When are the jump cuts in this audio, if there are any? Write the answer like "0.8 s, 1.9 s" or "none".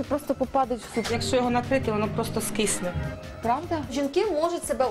1.2 s, 3.9 s